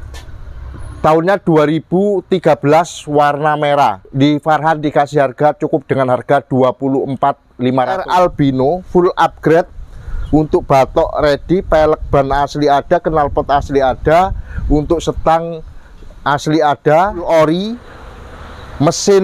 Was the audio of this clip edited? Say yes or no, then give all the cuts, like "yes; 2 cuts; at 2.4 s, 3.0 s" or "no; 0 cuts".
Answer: yes; 3 cuts; at 4.0 s, 8.0 s, 17.3 s